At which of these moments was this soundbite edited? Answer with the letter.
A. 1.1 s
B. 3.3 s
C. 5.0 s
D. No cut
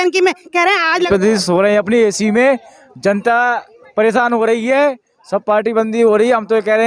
A